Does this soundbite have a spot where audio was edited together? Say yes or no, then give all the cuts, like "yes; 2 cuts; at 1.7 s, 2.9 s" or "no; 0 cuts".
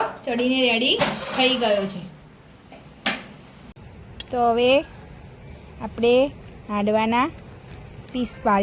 no; 0 cuts